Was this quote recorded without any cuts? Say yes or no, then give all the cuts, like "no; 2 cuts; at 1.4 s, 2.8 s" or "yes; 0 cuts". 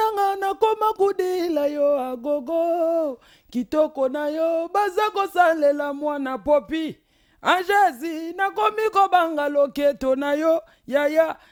yes; 0 cuts